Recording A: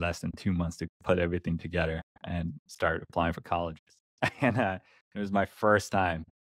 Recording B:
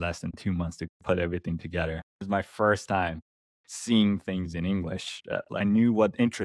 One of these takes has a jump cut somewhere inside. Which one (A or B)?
B